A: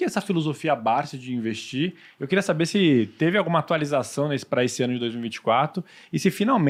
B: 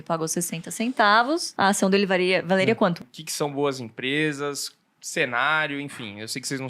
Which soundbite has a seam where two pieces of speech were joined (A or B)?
B